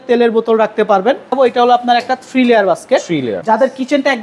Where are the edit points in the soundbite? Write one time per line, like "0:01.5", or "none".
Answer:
0:01.3
0:03.3